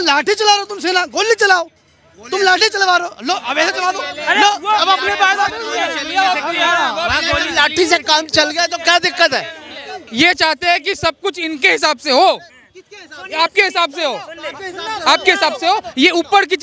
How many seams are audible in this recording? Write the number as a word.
one